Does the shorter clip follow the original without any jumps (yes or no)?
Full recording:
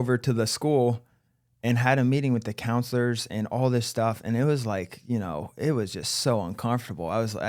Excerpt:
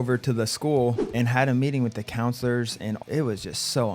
no